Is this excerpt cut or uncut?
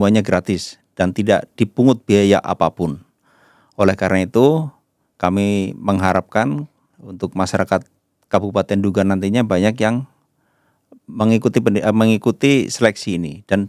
uncut